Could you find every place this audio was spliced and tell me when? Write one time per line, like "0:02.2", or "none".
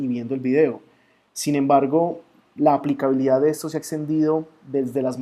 0:01.9